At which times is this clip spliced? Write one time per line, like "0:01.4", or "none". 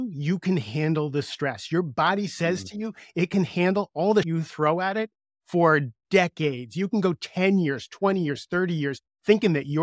0:04.3